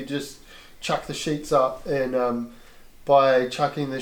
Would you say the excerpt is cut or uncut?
uncut